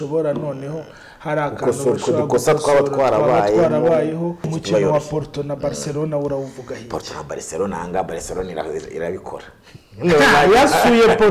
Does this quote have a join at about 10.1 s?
no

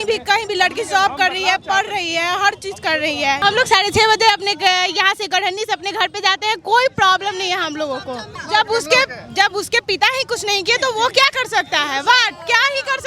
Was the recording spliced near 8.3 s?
yes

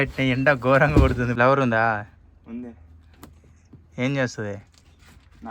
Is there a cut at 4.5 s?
no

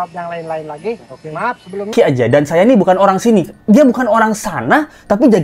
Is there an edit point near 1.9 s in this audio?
yes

